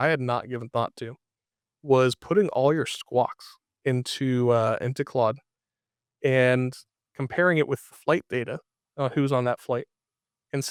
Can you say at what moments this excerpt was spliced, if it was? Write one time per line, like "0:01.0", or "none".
none